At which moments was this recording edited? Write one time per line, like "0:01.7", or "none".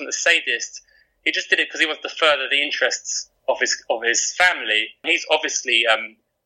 0:05.1